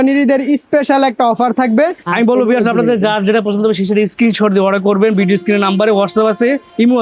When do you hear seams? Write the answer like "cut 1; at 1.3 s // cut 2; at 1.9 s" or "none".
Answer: cut 1; at 2.0 s